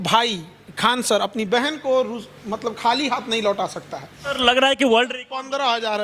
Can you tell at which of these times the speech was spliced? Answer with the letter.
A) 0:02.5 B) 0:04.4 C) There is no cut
B